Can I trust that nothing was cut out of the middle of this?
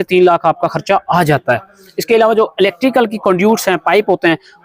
yes; 0 cuts

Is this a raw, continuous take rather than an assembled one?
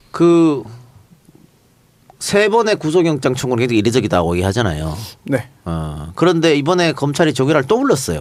yes; 0 cuts

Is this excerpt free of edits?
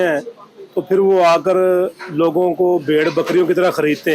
yes; 0 cuts

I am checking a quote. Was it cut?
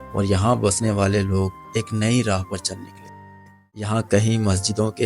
yes; 1 cut; at 3.9 s

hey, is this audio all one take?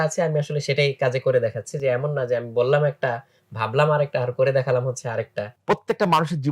no; 1 cut; at 5.5 s

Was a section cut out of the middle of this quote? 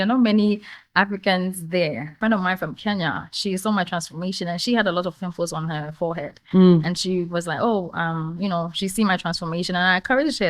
yes; 1 cut; at 2.2 s

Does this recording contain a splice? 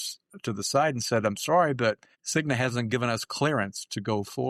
no; 0 cuts

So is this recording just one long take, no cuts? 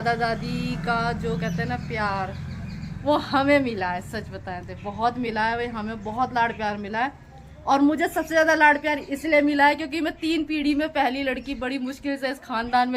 yes; 0 cuts

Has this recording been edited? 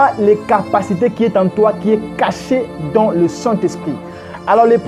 no; 0 cuts

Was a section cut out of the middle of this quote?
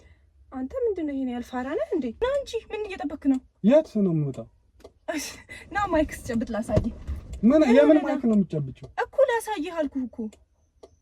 yes; 1 cut; at 2.2 s

